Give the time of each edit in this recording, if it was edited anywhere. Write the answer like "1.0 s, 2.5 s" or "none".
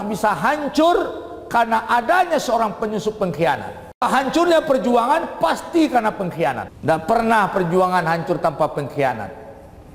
4.0 s, 6.7 s